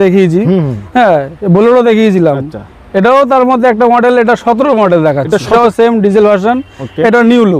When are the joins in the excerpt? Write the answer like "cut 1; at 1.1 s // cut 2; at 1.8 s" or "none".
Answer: cut 1; at 5.5 s